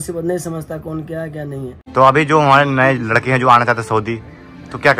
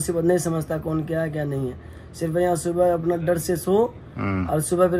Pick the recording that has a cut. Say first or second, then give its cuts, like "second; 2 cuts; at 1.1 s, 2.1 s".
first; 1 cut; at 1.8 s